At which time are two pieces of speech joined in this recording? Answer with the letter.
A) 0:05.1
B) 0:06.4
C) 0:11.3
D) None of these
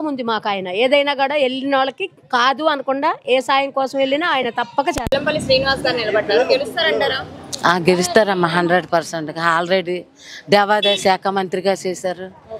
A